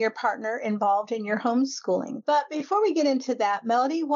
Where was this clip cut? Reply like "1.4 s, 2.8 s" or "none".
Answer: 2.5 s

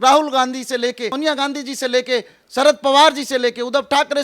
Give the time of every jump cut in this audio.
1.1 s

